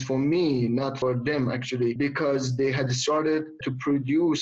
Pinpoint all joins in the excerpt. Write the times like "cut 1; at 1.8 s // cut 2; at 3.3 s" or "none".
cut 1; at 1.0 s // cut 2; at 1.9 s // cut 3; at 3.6 s